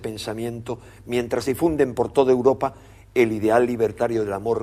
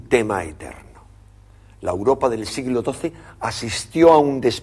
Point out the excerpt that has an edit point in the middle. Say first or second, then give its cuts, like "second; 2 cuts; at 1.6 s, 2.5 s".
first; 1 cut; at 2.3 s